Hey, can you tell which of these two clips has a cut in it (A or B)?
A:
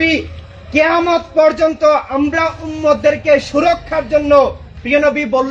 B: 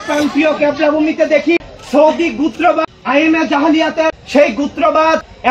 B